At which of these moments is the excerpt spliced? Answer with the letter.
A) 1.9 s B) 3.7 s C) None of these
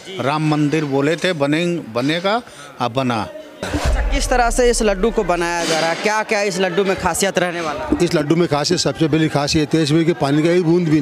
B